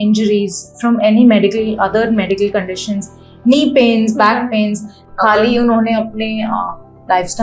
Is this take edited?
yes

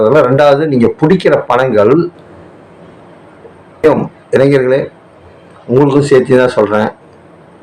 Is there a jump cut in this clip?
yes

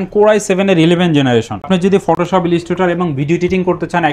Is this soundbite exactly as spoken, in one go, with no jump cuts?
yes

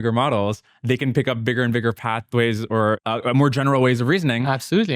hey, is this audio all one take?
yes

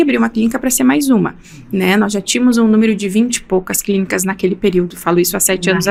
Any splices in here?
no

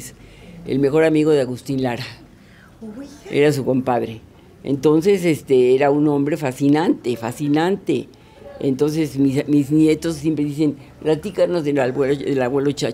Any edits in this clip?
no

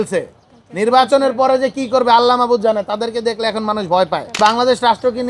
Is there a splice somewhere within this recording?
yes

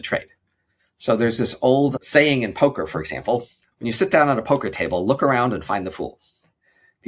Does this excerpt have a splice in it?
yes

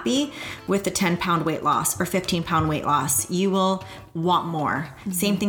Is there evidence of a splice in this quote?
no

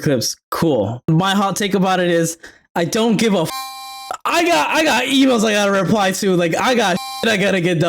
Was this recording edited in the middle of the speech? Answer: yes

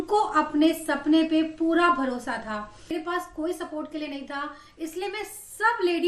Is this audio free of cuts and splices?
no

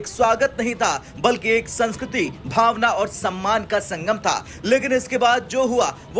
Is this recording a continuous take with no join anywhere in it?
yes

